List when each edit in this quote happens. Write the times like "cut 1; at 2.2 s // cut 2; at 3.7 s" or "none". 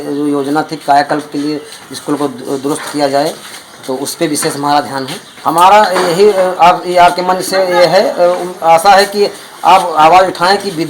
cut 1; at 5.2 s